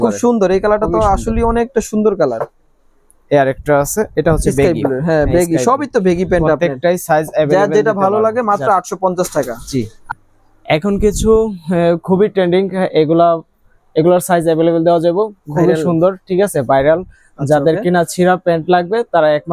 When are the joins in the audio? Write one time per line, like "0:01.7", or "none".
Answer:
none